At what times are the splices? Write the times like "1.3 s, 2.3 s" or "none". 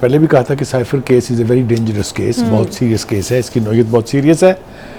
none